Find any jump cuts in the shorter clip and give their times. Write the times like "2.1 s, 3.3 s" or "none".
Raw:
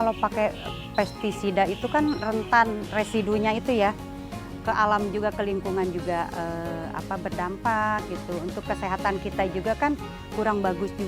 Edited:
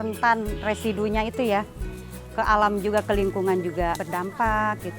4.0 s